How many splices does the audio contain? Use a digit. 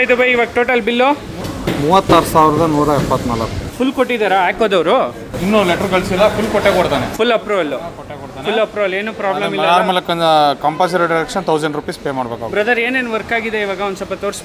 2